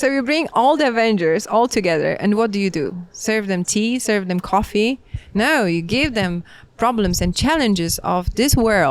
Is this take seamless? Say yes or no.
yes